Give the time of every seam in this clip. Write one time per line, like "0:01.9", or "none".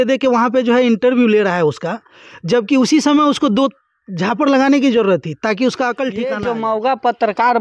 0:06.3